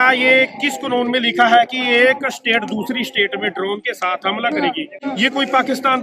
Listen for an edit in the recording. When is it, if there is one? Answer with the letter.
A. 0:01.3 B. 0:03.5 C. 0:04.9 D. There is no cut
C